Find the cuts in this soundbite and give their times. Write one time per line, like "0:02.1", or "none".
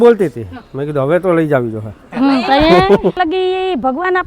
0:03.2